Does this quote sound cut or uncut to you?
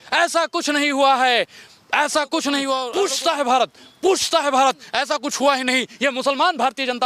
uncut